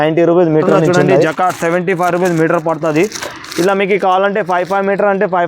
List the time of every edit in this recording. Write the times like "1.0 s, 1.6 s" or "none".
1.1 s